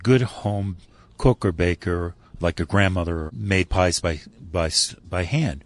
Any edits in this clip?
yes; 1 cut; at 3.3 s

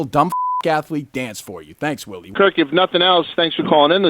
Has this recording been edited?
yes; 1 cut; at 2.3 s

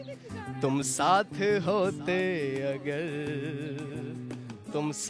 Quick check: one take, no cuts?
yes; 0 cuts

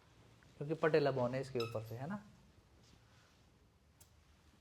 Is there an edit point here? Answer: no; 0 cuts

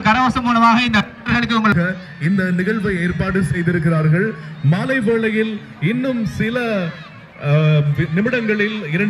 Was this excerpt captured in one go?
no; 1 cut; at 1.7 s

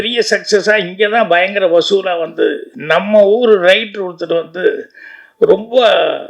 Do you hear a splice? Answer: yes; 1 cut; at 2.7 s

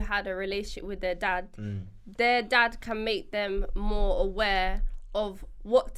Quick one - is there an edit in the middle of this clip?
no; 0 cuts

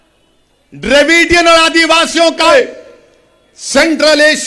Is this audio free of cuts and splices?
no; 1 cut; at 2.5 s

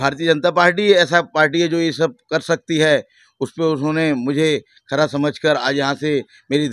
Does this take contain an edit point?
no; 0 cuts

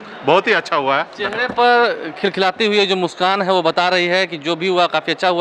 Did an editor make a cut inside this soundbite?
no; 0 cuts

